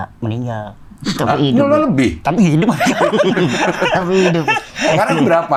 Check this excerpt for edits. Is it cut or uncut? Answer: uncut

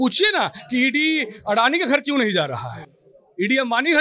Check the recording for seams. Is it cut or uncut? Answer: uncut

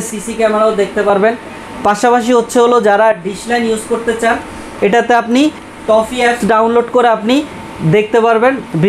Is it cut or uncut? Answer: uncut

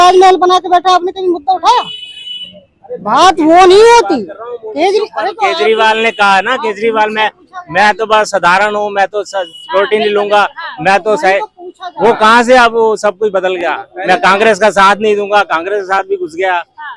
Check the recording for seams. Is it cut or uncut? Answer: uncut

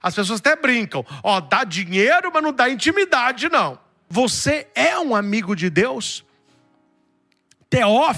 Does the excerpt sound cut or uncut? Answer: cut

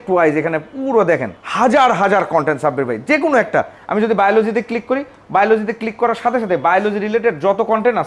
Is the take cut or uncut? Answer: uncut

